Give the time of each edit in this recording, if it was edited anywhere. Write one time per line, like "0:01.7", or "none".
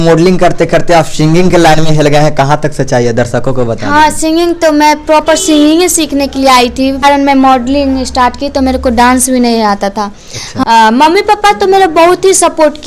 0:07.0
0:10.4